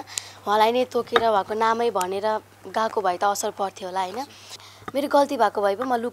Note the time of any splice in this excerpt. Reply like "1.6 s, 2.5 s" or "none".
4.7 s